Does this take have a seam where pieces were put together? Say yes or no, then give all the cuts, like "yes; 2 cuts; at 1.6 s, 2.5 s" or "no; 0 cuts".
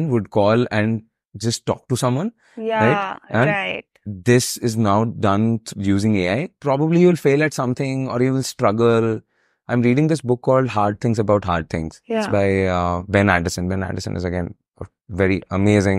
yes; 1 cut; at 6.5 s